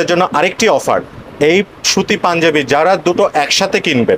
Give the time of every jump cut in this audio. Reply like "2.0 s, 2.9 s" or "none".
none